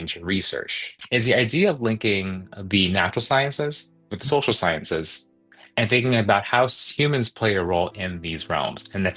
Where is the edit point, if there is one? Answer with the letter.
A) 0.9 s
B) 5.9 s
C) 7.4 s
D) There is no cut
A